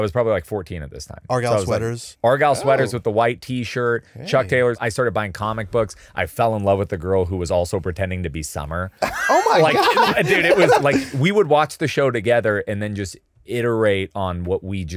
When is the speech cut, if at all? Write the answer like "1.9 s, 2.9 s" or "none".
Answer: 2.0 s, 4.8 s, 10.8 s